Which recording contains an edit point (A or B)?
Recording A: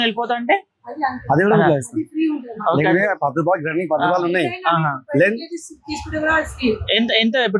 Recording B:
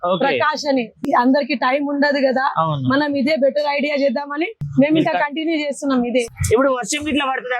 B